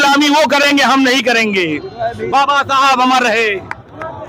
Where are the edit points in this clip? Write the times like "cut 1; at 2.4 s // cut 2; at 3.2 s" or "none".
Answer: none